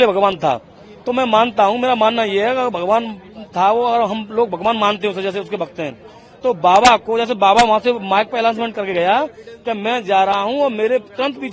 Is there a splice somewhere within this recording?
no; 0 cuts

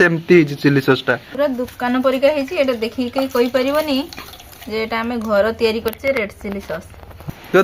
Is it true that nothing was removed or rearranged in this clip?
yes; 0 cuts

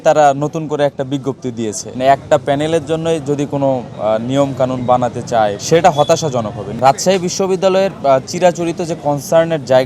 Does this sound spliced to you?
yes; 3 cuts; at 1.9 s, 5.6 s, 6.7 s

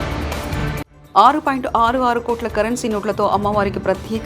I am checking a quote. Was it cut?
yes; 1 cut; at 0.9 s

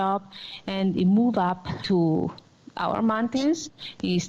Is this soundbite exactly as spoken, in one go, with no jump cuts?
no; 1 cut; at 1.8 s

